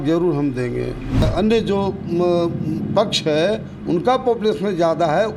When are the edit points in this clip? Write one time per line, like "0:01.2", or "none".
0:01.3